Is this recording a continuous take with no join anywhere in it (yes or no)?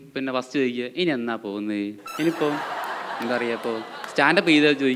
no